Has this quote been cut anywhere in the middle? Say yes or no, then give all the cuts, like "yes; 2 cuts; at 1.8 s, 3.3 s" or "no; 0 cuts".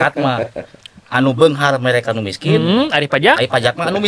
no; 0 cuts